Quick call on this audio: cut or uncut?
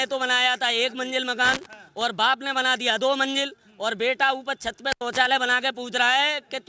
uncut